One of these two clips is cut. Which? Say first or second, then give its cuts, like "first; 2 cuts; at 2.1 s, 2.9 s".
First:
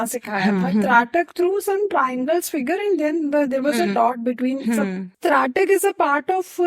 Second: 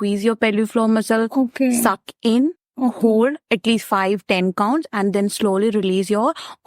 first; 1 cut; at 5.1 s